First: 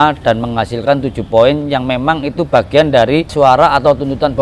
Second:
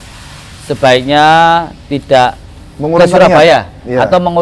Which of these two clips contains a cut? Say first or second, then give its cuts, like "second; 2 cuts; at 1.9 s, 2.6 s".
first; 1 cut; at 3.3 s